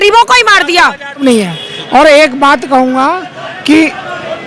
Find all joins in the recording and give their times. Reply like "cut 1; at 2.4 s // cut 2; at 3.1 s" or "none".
cut 1; at 1.2 s